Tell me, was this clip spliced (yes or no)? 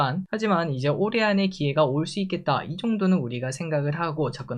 no